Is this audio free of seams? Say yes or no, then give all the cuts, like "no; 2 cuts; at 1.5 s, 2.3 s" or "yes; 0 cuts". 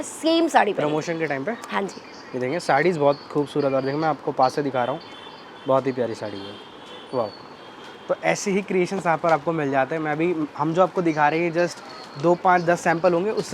yes; 0 cuts